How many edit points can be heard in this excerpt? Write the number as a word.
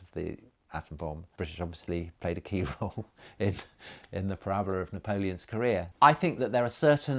two